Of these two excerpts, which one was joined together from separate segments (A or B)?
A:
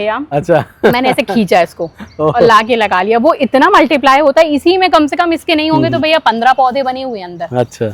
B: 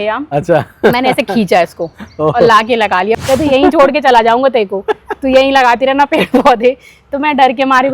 B